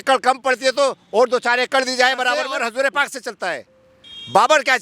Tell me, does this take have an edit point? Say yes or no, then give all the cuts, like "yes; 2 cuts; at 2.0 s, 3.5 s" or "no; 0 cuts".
yes; 1 cut; at 2.6 s